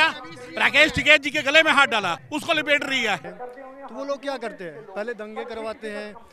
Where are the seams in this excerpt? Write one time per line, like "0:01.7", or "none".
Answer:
0:02.2
0:03.3